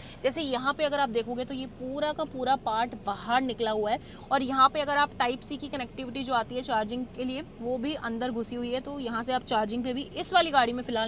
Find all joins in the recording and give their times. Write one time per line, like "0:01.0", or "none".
none